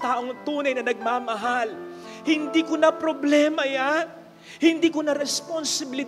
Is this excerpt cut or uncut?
uncut